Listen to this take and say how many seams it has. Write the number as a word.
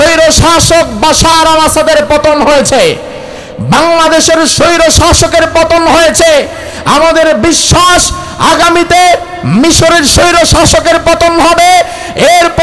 zero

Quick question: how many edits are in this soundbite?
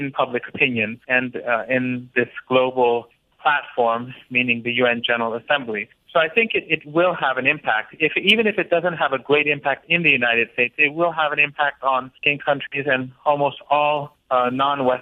zero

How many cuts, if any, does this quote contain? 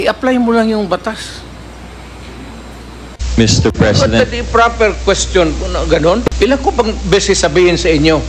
two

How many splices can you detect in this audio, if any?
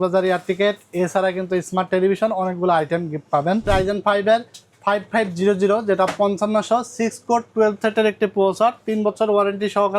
one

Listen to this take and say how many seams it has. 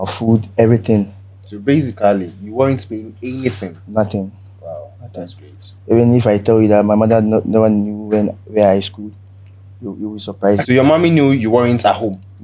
one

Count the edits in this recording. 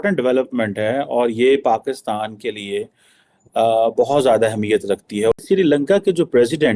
one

